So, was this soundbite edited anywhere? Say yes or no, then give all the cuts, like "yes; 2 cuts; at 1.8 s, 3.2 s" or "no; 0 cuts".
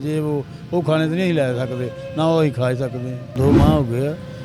no; 0 cuts